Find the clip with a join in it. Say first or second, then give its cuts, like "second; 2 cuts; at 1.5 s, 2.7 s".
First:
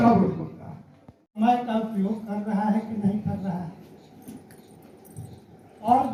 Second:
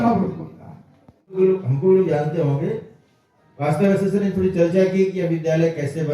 second; 1 cut; at 1.4 s